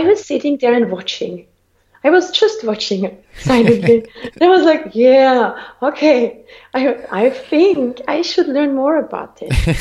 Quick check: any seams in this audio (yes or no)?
no